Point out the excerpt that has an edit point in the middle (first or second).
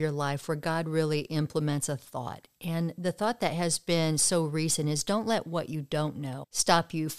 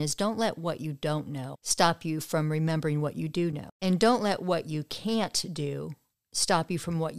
second